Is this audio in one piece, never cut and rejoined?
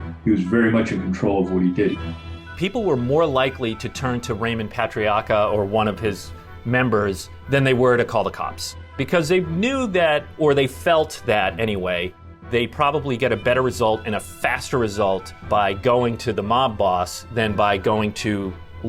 no; 4 cuts; at 1.9 s, 9.0 s, 12.4 s, 15.3 s

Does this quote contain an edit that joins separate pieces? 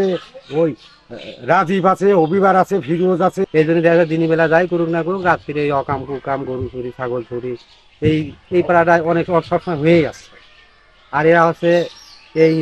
yes; 1 cut; at 3.4 s

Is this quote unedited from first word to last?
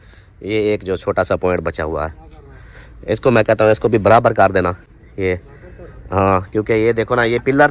yes; 0 cuts

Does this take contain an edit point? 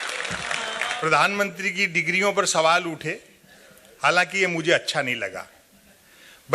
yes; 1 cut; at 1.0 s

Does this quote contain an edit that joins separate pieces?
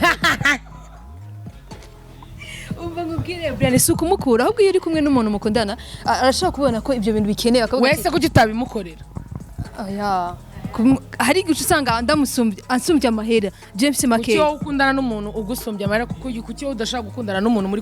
no; 0 cuts

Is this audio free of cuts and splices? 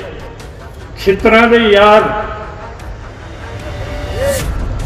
yes; 0 cuts

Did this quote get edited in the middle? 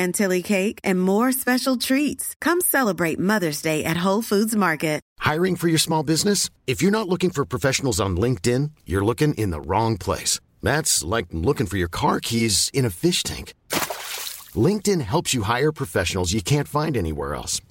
yes; 1 cut; at 5.0 s

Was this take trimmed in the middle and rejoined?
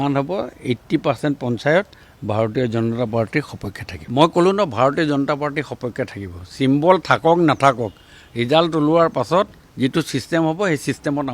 no; 0 cuts

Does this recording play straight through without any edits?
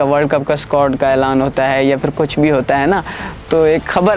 yes; 0 cuts

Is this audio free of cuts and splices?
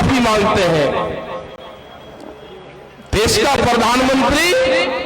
yes; 0 cuts

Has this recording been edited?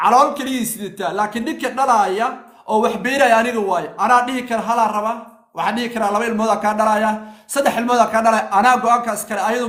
no; 0 cuts

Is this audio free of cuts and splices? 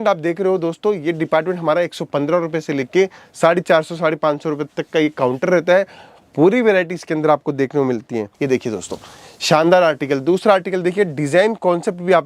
no; 1 cut; at 8.3 s

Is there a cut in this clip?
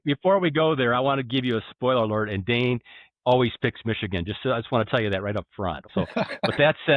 yes; 1 cut; at 6.0 s

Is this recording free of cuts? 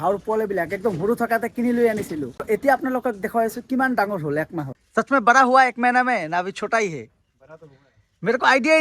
no; 2 cuts; at 2.4 s, 4.6 s

